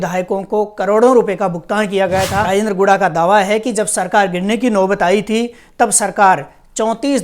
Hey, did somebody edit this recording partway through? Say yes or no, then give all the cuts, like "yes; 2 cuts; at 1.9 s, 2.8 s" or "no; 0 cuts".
yes; 1 cut; at 2.5 s